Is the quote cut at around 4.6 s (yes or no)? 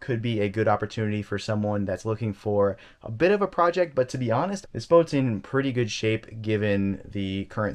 yes